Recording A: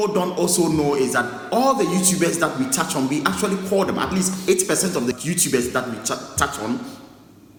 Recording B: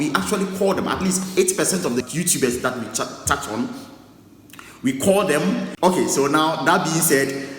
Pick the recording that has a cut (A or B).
B